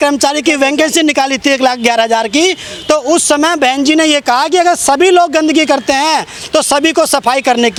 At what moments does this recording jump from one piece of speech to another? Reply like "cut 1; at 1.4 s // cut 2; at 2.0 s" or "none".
none